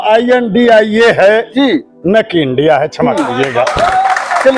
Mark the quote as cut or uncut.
uncut